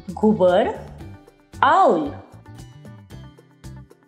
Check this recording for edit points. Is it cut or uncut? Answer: uncut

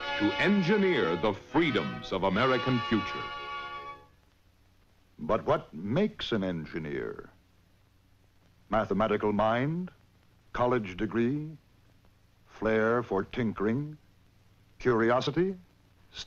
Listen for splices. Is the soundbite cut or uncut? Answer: cut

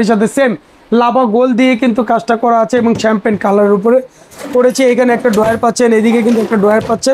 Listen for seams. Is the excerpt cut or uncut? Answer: uncut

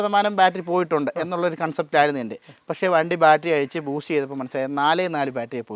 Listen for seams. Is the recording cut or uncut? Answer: uncut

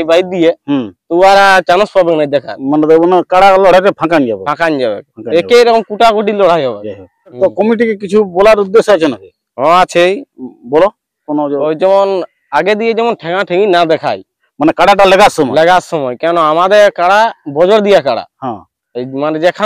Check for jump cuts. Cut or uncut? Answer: cut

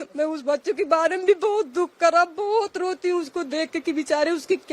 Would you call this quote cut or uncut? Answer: uncut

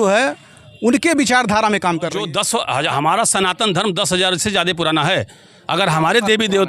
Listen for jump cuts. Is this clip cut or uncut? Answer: cut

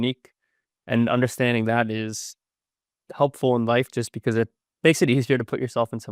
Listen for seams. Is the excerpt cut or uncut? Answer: uncut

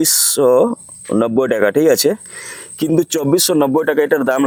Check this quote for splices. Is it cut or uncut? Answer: uncut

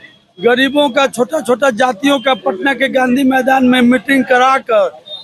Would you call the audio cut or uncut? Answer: uncut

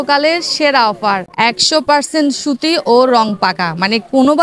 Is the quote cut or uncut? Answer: cut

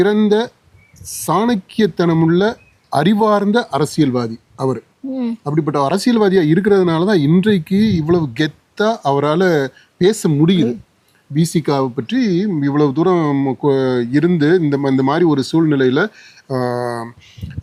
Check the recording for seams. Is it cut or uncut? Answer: uncut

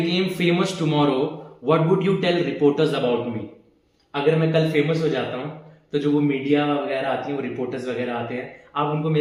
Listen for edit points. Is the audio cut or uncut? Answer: uncut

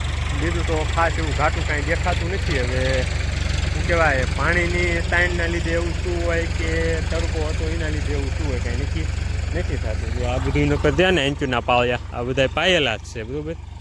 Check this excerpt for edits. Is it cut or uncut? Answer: uncut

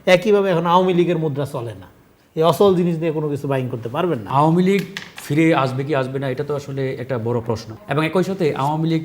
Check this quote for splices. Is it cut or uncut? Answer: cut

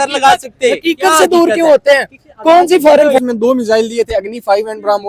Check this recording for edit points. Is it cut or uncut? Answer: cut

